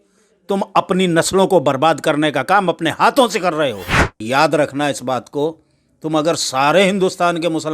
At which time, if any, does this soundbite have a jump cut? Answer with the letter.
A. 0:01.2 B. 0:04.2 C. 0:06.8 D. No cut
B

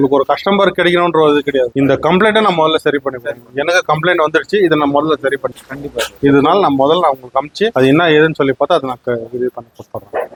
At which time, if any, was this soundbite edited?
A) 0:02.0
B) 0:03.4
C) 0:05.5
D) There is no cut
D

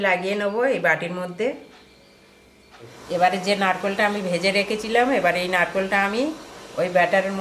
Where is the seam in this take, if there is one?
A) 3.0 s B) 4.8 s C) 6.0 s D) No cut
A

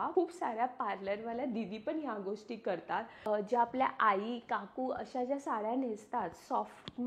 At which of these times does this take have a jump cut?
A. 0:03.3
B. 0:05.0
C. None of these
A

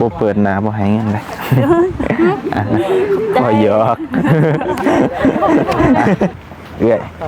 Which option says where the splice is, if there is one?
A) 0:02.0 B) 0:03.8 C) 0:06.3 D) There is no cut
C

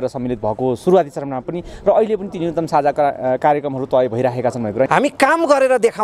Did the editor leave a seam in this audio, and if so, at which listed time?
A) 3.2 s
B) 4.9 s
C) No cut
B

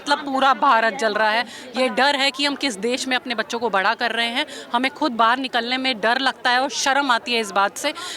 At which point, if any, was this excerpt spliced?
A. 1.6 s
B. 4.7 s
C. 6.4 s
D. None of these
A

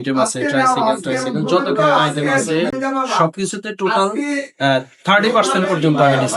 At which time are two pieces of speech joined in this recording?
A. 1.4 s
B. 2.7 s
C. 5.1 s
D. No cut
B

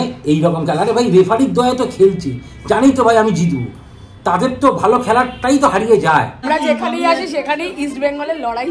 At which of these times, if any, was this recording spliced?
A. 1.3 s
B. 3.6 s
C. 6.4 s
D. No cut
C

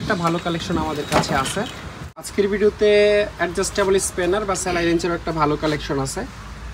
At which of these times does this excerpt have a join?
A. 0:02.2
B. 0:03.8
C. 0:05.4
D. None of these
A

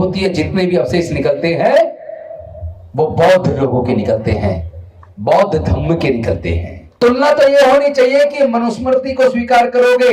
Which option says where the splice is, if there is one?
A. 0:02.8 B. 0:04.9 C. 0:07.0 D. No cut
C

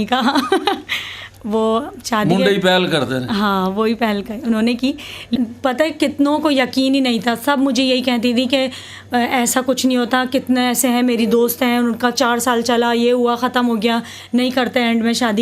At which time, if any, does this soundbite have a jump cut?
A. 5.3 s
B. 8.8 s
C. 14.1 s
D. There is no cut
A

